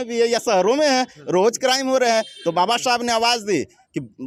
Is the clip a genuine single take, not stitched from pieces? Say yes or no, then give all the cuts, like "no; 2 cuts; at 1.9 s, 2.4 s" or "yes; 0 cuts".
yes; 0 cuts